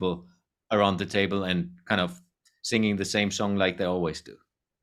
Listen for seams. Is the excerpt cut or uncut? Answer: uncut